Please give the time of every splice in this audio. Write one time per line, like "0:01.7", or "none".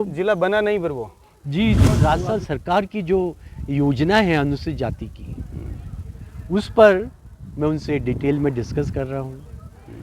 0:02.0